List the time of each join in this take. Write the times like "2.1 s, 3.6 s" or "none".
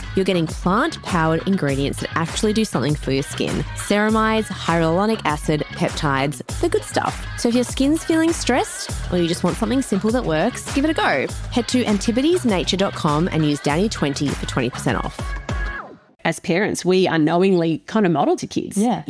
16.2 s, 18.2 s